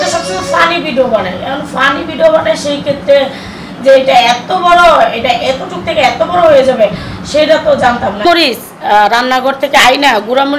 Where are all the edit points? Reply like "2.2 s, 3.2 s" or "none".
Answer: 8.2 s